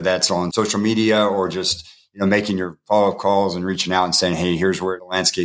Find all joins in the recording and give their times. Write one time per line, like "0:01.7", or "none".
none